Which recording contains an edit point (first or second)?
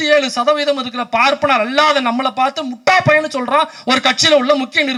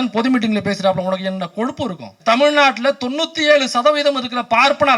second